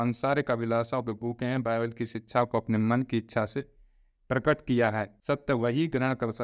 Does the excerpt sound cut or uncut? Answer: cut